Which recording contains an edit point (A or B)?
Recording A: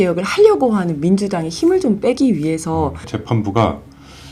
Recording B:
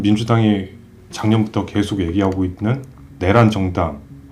A